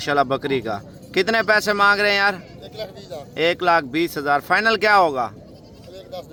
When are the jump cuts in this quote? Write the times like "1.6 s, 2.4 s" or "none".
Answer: none